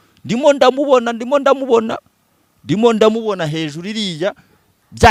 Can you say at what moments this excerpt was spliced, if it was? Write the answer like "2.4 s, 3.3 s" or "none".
none